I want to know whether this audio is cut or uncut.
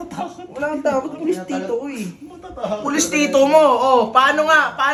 uncut